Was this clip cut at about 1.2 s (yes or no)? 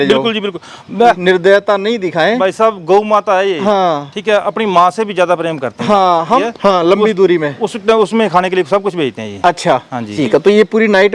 yes